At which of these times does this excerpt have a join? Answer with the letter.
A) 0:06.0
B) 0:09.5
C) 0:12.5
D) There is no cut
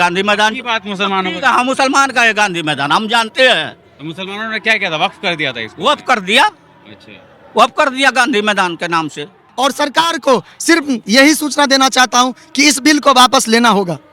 B